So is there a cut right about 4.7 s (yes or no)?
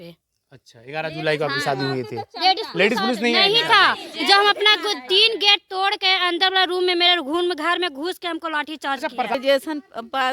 no